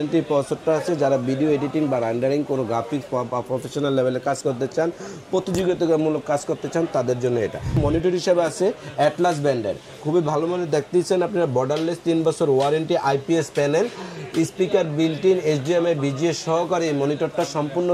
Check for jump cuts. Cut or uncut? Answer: cut